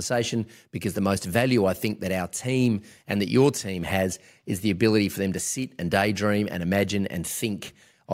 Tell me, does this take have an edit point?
no; 0 cuts

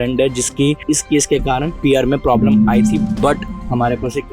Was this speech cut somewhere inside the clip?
yes; 1 cut; at 1.7 s

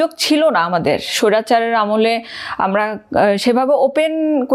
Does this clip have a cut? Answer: no; 0 cuts

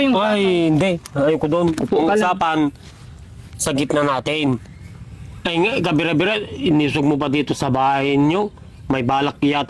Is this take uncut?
yes; 0 cuts

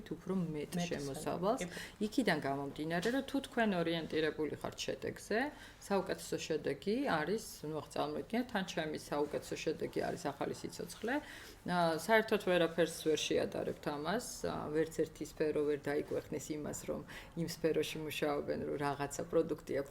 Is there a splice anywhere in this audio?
no; 0 cuts

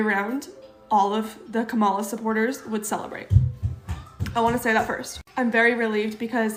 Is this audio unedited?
yes; 0 cuts

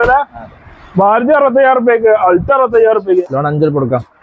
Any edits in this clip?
yes; 1 cut; at 3.2 s

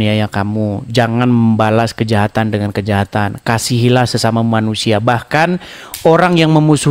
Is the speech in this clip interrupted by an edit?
no; 0 cuts

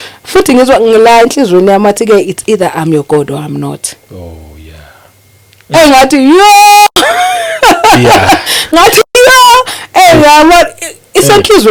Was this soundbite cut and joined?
no; 0 cuts

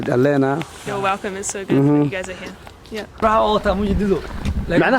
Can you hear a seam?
yes; 1 cut; at 3.2 s

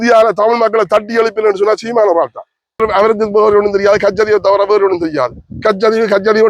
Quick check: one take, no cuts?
no; 1 cut; at 2.8 s

